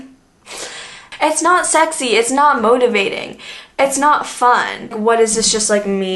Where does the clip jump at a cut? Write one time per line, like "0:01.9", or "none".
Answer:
0:01.0
0:05.0